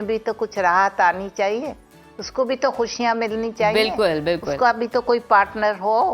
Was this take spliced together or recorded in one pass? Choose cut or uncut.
uncut